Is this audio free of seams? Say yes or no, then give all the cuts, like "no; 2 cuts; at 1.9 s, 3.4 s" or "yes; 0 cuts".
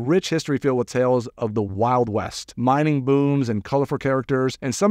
yes; 0 cuts